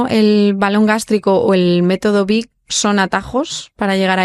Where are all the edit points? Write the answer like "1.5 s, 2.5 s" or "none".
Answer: none

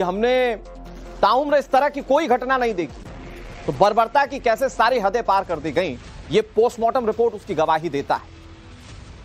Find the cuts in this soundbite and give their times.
none

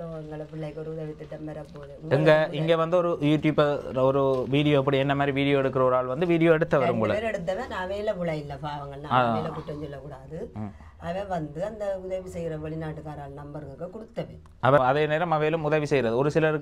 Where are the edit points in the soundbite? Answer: 14.8 s

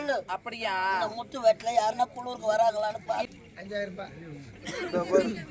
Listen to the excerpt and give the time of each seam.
3.3 s

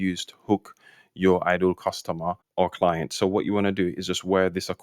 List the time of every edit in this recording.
2.4 s

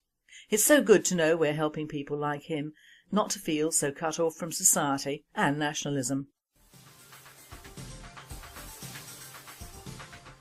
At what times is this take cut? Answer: none

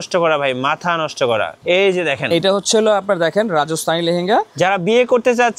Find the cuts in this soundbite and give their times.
1.5 s

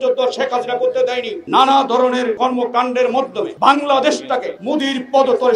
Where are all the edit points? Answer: 1.3 s, 2.3 s, 3.5 s, 4.5 s

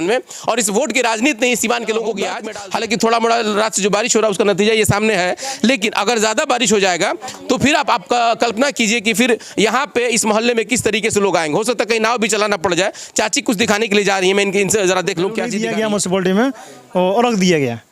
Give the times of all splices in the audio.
2.4 s, 15.5 s

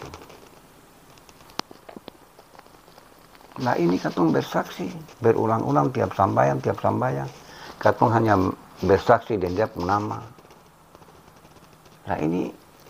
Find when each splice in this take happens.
1.5 s

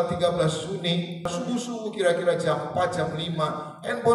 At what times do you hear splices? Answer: 1.3 s

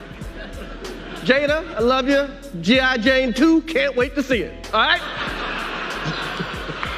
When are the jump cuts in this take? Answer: none

